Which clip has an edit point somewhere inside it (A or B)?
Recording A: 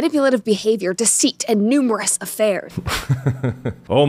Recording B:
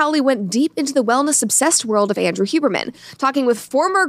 A